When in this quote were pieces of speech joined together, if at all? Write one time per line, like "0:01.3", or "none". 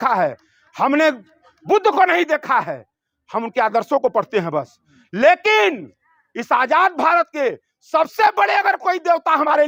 none